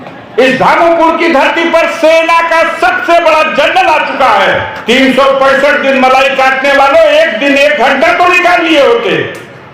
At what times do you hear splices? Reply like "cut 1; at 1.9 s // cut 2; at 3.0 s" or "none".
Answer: cut 1; at 4.7 s

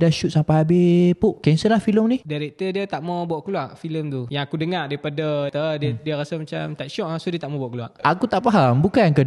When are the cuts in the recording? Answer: cut 1; at 1.4 s // cut 2; at 2.3 s // cut 3; at 4.3 s // cut 4; at 5.5 s // cut 5; at 7.9 s

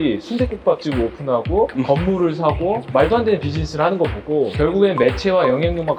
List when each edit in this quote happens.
cut 1; at 1.7 s // cut 2; at 2.8 s // cut 3; at 4.5 s

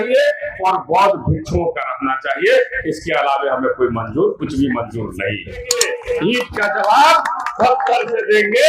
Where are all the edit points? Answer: cut 1; at 5.7 s

